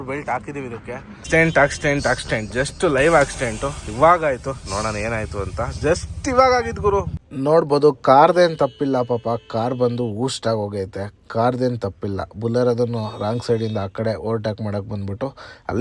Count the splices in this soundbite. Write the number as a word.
two